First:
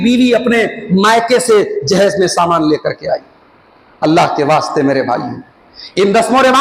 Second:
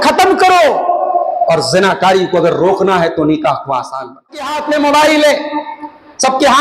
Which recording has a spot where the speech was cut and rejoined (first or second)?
second